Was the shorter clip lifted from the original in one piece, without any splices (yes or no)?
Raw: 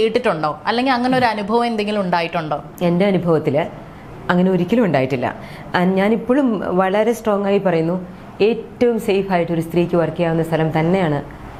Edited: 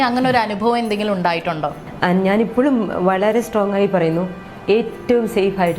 no